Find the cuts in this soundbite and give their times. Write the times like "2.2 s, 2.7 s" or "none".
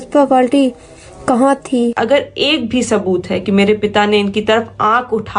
2.0 s